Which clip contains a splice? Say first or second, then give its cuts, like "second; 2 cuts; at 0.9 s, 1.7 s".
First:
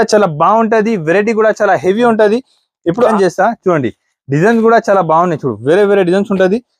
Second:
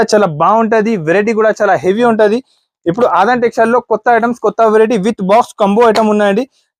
first; 1 cut; at 3.1 s